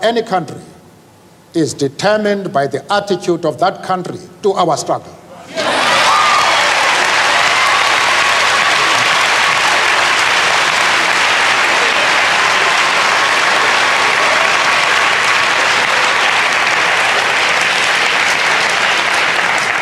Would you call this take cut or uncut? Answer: uncut